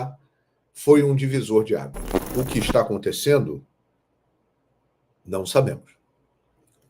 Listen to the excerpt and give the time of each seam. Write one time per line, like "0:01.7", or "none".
0:02.1